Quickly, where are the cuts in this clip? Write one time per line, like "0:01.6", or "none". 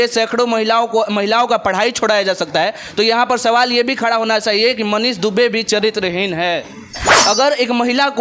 0:07.0